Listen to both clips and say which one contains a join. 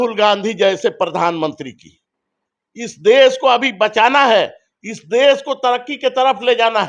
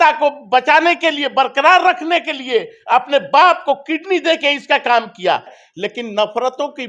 second; 1 cut; at 5.5 s

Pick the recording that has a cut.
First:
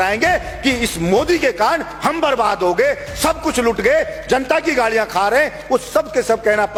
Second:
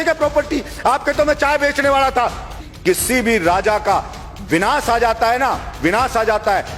second; 1 cut; at 2.6 s

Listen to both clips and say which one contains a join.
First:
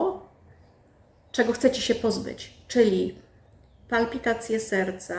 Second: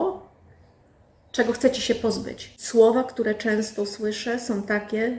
second; 1 cut; at 2.6 s

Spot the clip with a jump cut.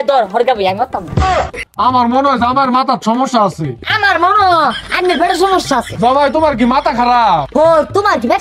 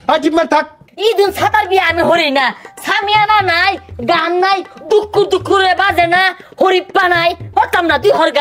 first; 1 cut; at 1.6 s

